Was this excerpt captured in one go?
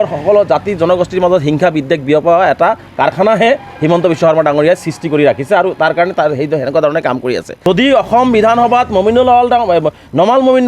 no; 1 cut; at 7.5 s

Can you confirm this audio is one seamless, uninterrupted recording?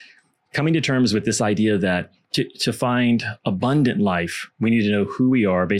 no; 1 cut; at 2.2 s

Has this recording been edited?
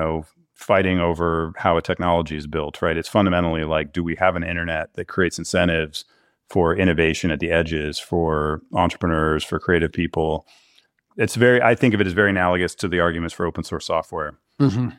no; 0 cuts

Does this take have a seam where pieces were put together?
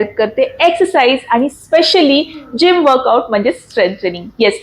no; 0 cuts

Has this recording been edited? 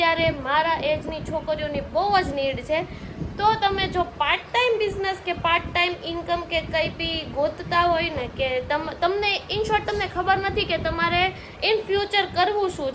no; 0 cuts

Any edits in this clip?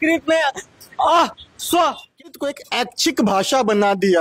yes; 1 cut; at 2.3 s

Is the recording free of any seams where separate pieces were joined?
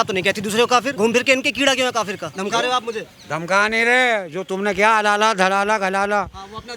no; 2 cuts; at 0.9 s, 2.2 s

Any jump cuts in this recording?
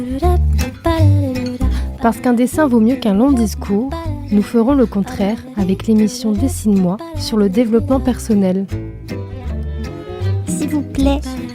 yes; 1 cut; at 1.0 s

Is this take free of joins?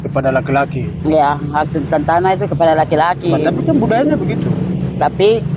yes; 0 cuts

